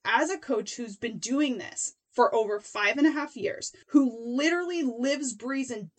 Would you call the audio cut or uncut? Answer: cut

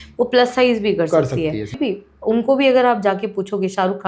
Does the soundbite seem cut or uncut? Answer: cut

